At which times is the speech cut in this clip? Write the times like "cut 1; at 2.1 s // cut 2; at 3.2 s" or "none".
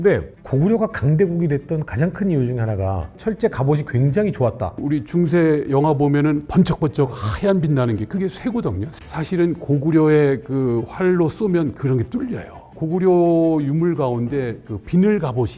cut 1; at 3.1 s // cut 2; at 4.7 s // cut 3; at 8.9 s // cut 4; at 12.7 s